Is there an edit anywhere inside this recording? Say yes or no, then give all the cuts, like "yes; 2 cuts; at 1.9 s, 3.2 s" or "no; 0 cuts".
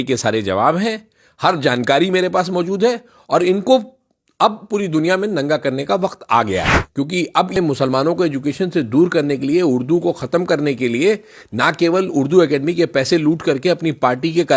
yes; 1 cut; at 7.6 s